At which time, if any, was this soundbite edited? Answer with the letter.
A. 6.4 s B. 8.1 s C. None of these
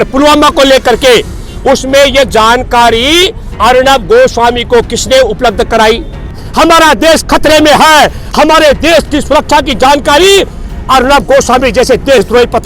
A